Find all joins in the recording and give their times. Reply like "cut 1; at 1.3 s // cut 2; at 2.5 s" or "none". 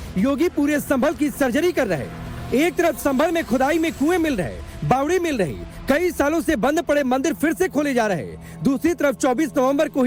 none

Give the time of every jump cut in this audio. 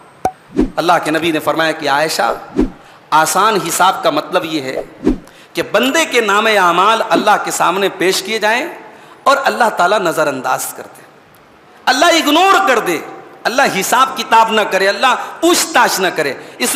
none

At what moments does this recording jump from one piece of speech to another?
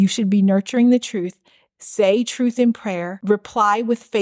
cut 1; at 3.1 s

